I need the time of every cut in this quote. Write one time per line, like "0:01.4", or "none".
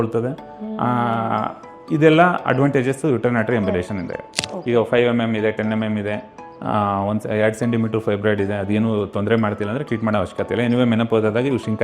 0:04.5

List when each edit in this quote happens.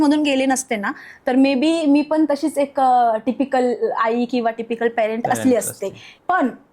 none

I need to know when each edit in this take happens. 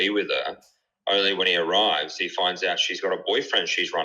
none

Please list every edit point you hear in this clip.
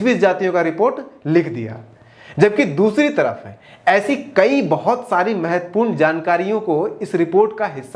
none

